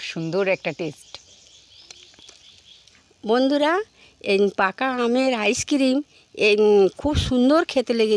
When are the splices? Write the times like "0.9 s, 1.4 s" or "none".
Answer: 3.2 s